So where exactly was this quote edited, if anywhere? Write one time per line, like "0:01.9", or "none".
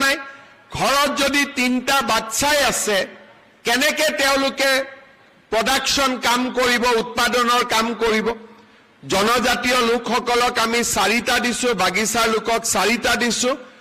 0:02.0